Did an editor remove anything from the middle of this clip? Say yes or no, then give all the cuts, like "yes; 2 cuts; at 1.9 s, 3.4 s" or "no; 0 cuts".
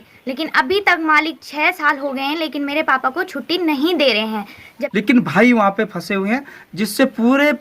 yes; 1 cut; at 4.8 s